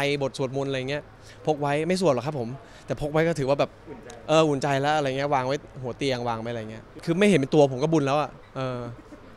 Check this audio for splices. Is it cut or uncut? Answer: cut